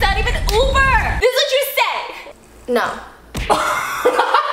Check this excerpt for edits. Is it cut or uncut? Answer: cut